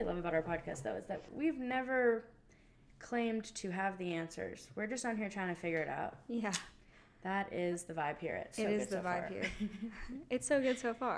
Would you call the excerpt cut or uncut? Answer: cut